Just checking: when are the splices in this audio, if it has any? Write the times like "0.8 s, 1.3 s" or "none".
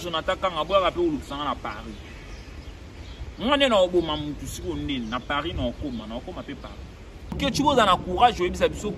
7.4 s